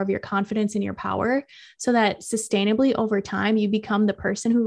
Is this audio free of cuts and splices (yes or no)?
yes